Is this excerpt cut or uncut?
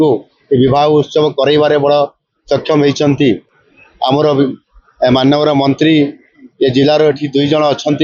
uncut